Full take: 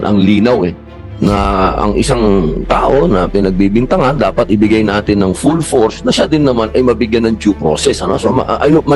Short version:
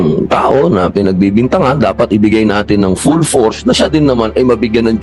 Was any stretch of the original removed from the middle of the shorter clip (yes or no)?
no